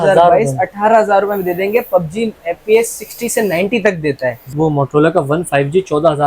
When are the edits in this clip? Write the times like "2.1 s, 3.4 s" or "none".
4.4 s